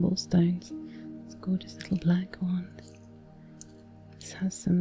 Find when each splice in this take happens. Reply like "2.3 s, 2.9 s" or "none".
none